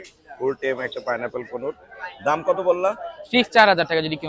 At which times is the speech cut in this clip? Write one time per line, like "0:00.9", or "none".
none